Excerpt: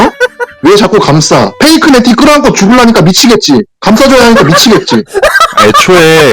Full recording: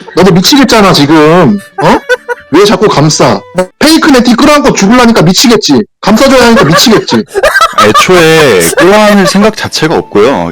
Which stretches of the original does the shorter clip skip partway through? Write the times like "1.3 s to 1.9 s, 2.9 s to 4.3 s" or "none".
3.4 s to 3.7 s